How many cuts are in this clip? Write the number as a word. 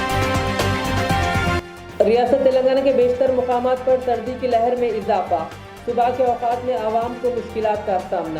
one